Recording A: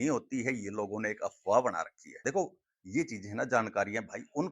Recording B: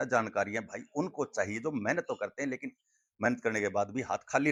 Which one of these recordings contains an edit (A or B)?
A